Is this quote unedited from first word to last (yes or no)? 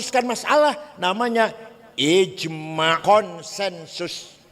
no